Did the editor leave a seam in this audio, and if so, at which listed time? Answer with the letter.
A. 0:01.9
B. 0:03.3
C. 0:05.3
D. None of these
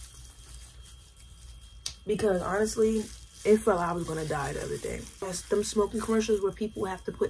C